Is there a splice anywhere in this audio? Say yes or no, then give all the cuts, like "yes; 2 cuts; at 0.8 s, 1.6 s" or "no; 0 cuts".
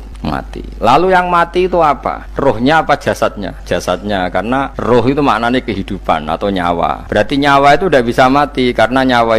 yes; 4 cuts; at 2.2 s, 3.5 s, 4.7 s, 7.0 s